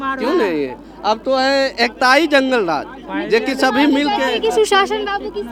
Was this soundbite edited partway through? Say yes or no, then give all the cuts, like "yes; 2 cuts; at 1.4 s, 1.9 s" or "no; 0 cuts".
no; 0 cuts